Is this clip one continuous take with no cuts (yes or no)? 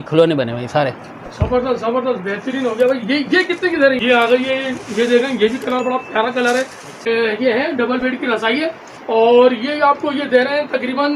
no